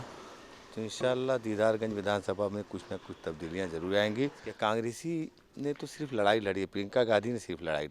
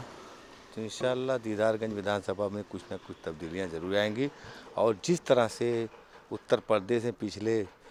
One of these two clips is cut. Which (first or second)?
first